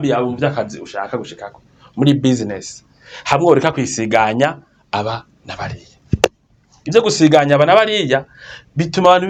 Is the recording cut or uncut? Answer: uncut